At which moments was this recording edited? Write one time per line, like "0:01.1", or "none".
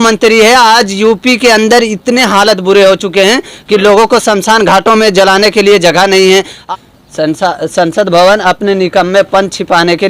0:06.6